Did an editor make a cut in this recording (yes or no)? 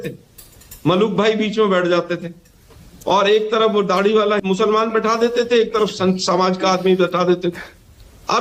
no